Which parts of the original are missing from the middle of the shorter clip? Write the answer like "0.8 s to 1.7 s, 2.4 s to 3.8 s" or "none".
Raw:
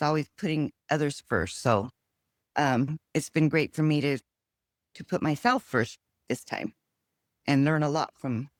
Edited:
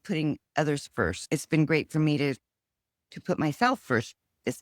1.5 s to 3.0 s